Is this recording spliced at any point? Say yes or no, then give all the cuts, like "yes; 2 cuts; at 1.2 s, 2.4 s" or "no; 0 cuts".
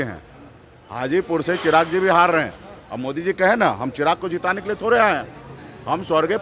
no; 0 cuts